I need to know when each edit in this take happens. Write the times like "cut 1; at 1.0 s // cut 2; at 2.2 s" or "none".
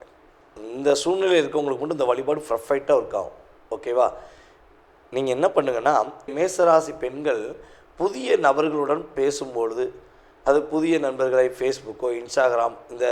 cut 1; at 6.3 s